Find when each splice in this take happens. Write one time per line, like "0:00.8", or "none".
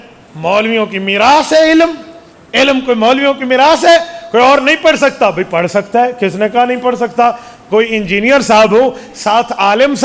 none